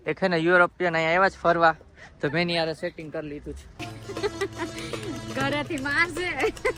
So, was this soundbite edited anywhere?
no; 0 cuts

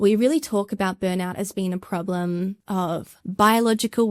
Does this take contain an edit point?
yes; 1 cut; at 2.8 s

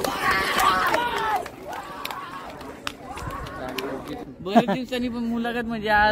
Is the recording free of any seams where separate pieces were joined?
yes; 0 cuts

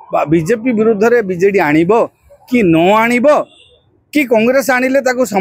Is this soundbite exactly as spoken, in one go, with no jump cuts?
yes; 0 cuts

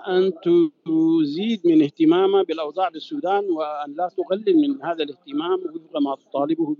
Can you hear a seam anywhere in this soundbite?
no; 0 cuts

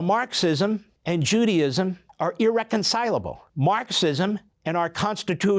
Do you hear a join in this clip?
yes; 4 cuts; at 0.9 s, 2.0 s, 3.4 s, 4.5 s

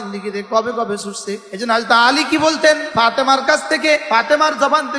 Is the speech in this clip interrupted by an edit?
yes; 3 cuts; at 1.5 s, 2.9 s, 4.0 s

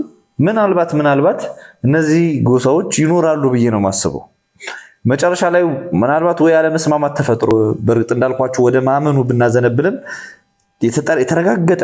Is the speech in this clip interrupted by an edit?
yes; 1 cut; at 7.5 s

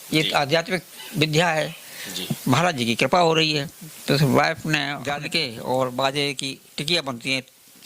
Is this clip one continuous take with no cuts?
no; 1 cut; at 5.0 s

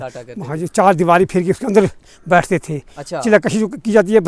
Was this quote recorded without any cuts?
yes; 0 cuts

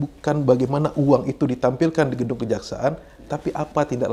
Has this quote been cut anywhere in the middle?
no; 0 cuts

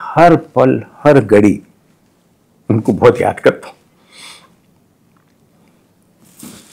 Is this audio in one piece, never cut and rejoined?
yes; 0 cuts

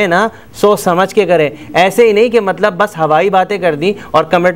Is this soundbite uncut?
yes; 0 cuts

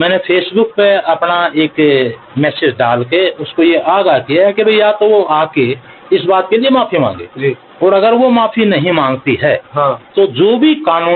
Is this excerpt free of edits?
yes; 0 cuts

